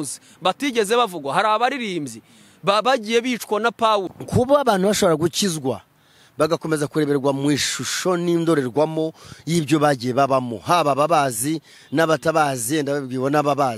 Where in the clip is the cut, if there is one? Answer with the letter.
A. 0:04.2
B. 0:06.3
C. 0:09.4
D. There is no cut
A